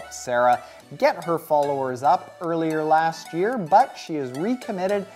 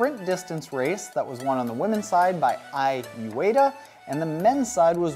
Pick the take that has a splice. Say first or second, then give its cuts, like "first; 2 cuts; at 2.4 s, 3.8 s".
second; 1 cut; at 2.7 s